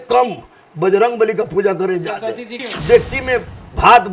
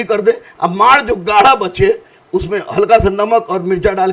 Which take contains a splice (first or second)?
first